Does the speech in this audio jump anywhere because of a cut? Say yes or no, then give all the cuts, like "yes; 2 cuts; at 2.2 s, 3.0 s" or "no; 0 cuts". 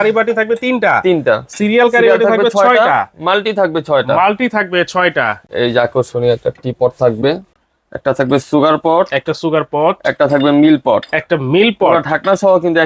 yes; 2 cuts; at 5.4 s, 7.5 s